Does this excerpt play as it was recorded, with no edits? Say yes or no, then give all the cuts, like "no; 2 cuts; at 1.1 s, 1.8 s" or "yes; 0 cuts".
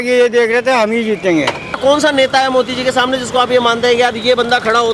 no; 1 cut; at 1.7 s